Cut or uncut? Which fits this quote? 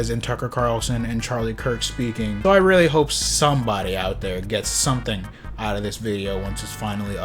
cut